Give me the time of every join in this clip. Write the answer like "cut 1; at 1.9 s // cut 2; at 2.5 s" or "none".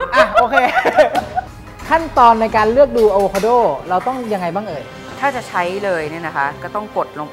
cut 1; at 1.4 s